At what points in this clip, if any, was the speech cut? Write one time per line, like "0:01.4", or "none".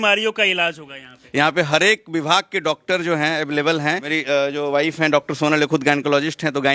0:01.1
0:04.1

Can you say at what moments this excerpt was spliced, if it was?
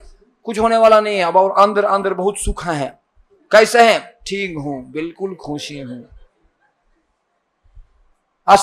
none

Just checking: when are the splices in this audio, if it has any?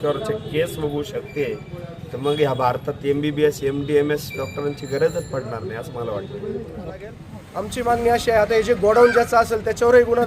0:07.1

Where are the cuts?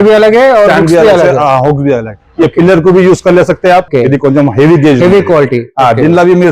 0:03.9

